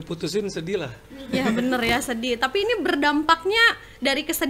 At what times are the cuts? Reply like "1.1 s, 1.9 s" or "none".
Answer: none